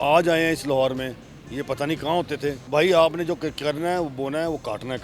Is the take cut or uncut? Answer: cut